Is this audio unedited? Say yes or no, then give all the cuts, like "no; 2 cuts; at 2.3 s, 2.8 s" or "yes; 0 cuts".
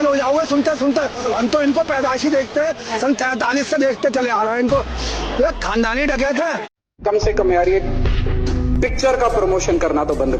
yes; 0 cuts